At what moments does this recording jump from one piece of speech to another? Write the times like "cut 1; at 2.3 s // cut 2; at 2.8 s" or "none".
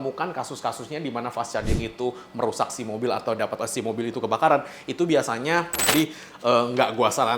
cut 1; at 5.8 s